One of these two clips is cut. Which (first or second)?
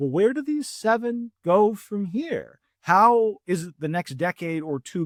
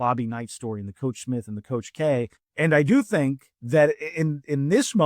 second